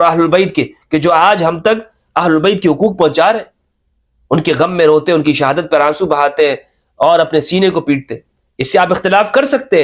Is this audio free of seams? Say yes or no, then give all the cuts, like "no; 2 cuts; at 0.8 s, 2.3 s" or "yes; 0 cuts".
yes; 0 cuts